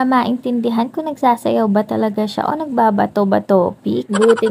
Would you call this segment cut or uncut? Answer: uncut